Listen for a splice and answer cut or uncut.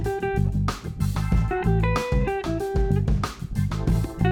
uncut